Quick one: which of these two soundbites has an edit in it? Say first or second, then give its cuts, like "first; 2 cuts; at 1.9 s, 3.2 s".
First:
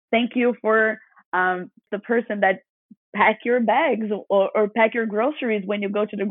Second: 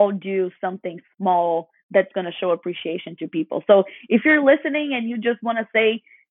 first; 1 cut; at 1.8 s